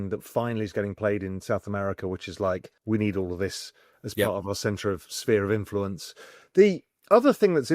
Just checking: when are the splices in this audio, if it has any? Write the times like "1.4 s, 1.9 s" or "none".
2.7 s